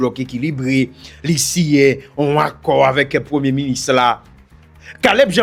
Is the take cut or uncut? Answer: uncut